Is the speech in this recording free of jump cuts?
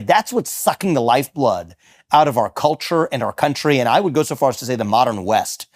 yes; 0 cuts

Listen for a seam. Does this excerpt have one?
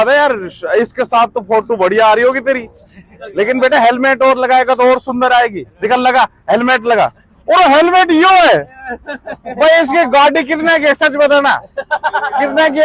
no; 0 cuts

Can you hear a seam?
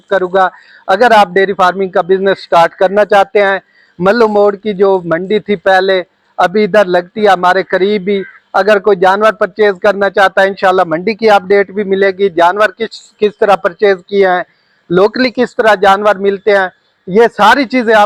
no; 0 cuts

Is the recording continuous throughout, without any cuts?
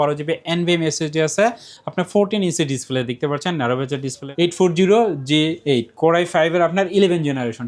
no; 1 cut; at 4.1 s

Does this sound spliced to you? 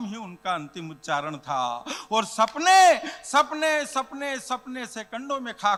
no; 0 cuts

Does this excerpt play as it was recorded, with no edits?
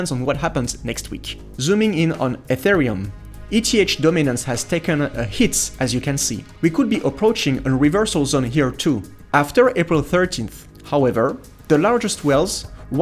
no; 3 cuts; at 1.5 s, 6.4 s, 9.1 s

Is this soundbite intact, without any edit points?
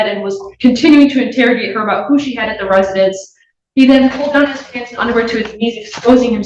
yes; 0 cuts

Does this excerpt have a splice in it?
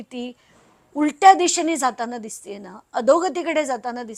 no; 0 cuts

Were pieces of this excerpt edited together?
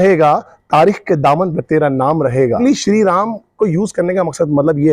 yes; 1 cut; at 2.6 s

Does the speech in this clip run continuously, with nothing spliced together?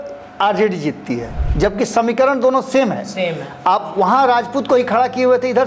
no; 1 cut; at 1.4 s

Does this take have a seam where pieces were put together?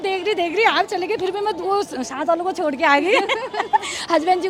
no; 0 cuts

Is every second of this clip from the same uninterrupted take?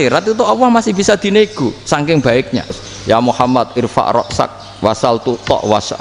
no; 1 cut; at 2.9 s

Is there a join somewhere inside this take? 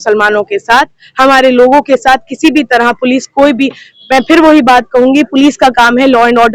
no; 0 cuts

